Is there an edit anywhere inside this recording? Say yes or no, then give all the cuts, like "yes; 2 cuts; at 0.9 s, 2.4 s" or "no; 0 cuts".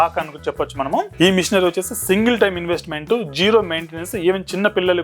yes; 1 cut; at 1.1 s